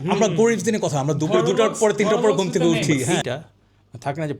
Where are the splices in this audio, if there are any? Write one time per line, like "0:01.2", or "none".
0:03.1